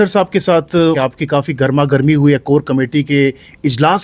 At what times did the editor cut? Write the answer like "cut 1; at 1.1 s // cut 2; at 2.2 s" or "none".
cut 1; at 1.0 s